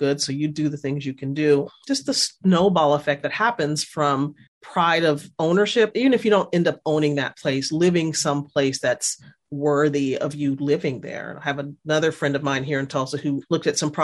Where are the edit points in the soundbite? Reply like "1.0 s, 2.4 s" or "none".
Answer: none